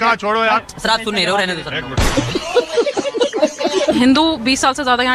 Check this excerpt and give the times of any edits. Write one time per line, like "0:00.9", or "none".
0:02.0
0:04.0